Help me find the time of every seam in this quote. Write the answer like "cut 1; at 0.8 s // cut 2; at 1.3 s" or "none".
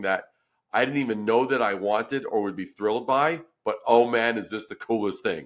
none